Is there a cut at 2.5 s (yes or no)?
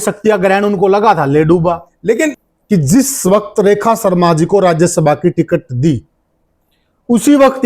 yes